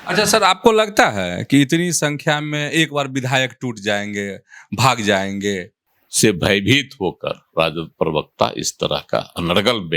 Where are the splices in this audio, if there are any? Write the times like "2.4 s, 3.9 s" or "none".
5.7 s